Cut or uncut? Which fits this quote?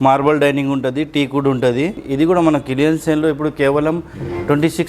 cut